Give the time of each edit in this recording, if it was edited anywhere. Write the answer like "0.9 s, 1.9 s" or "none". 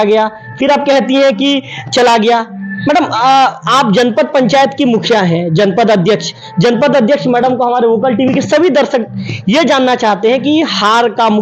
none